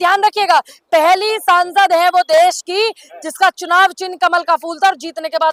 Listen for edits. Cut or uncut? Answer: uncut